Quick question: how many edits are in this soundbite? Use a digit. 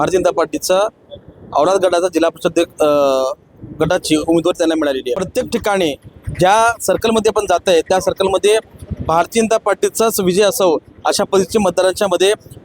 1